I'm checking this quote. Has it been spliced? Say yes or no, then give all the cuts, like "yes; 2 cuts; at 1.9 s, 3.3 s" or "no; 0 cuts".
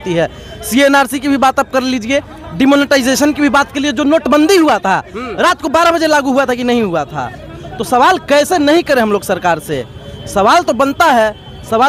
no; 0 cuts